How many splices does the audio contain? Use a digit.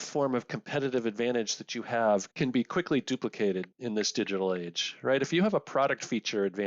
1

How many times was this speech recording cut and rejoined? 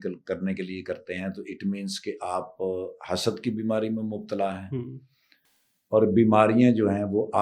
0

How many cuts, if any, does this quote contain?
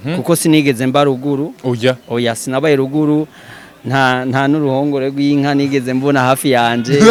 0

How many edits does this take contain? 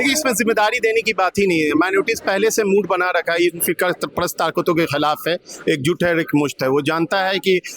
0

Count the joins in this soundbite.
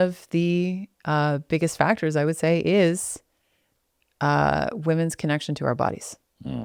0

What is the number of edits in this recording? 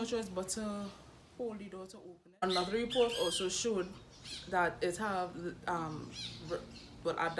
1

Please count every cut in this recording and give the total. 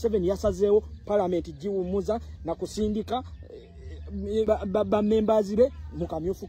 1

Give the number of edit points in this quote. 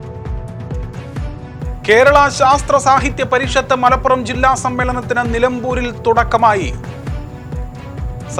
0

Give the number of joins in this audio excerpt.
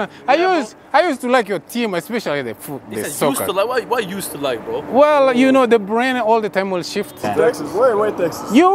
1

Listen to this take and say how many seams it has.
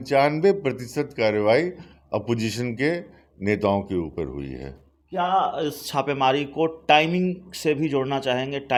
0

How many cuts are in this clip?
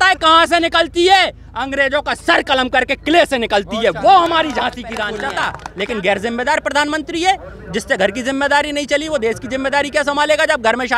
1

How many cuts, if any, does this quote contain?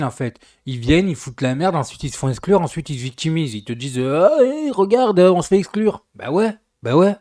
0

